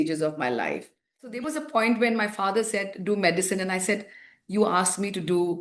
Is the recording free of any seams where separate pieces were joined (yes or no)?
no